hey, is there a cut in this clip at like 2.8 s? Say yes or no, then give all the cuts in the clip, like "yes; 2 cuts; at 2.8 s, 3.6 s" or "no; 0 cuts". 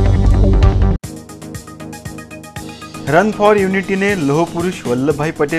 yes; 1 cut; at 2.8 s